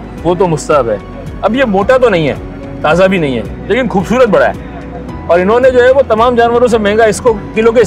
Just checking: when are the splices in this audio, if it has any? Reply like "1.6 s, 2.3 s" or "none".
none